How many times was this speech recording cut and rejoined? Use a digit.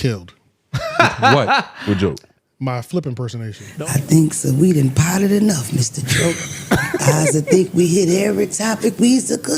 1